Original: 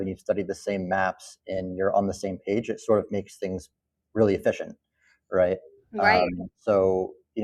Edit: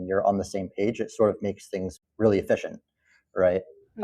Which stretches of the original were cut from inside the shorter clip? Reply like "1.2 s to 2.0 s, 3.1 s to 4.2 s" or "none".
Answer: 3.7 s to 4.0 s